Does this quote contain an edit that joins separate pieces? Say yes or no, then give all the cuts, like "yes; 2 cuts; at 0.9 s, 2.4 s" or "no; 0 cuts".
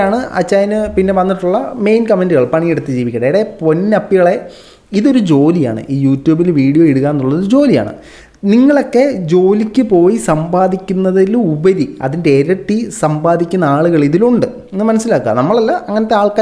no; 0 cuts